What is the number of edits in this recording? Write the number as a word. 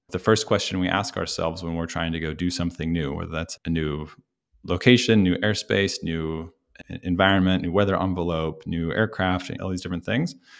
zero